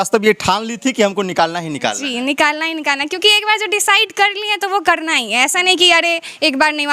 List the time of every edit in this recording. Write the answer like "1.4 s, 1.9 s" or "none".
none